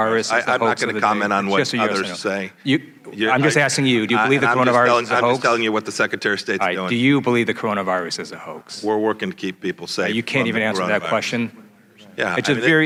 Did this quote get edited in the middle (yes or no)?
no